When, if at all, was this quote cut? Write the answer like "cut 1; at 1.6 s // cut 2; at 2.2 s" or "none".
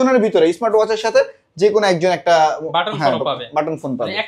none